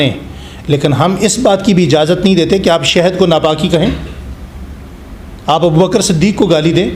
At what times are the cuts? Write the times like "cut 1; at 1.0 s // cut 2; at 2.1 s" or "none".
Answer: none